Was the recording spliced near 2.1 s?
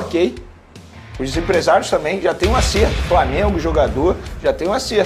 no; 0 cuts

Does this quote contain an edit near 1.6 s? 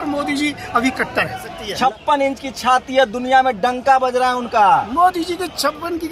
yes; 1 cut; at 1.6 s

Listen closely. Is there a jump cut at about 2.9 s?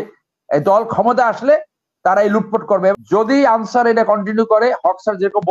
yes; 1 cut; at 2.9 s

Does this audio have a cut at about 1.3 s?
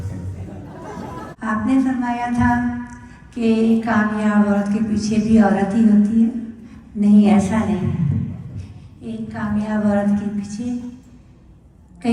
yes; 1 cut; at 1.3 s

